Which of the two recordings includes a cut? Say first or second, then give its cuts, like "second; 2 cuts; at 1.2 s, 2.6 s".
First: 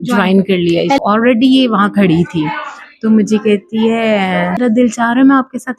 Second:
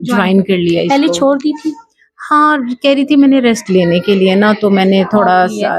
first; 2 cuts; at 1.0 s, 4.6 s